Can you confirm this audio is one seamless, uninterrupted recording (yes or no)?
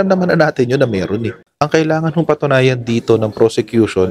no